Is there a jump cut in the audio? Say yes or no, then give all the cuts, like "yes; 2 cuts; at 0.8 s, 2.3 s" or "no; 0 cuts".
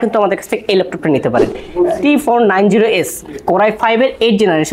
yes; 1 cut; at 1.6 s